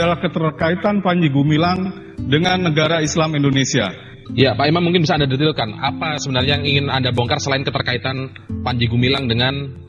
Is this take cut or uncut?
uncut